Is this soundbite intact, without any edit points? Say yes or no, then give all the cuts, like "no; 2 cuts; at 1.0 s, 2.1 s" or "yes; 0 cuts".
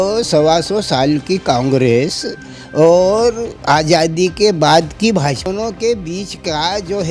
no; 1 cut; at 5.5 s